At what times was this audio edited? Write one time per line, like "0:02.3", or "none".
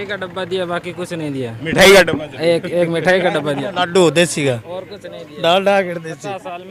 none